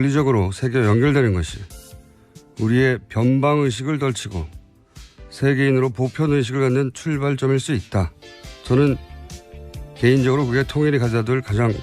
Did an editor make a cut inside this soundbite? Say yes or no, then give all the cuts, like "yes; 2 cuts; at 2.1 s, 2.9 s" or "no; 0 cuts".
yes; 1 cut; at 4.0 s